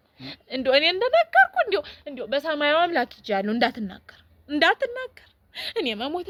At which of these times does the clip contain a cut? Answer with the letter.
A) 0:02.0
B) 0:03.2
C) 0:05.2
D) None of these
D